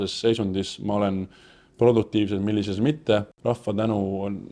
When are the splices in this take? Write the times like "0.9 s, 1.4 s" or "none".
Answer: 3.3 s